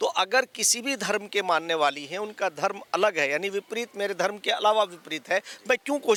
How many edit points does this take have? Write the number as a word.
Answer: zero